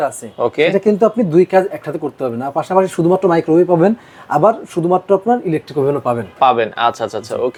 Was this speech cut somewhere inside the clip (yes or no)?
no